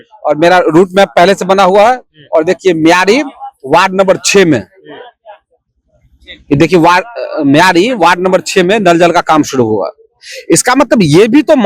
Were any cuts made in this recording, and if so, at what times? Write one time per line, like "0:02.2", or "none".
none